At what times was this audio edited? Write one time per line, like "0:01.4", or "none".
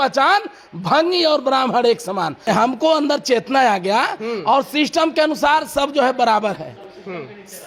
none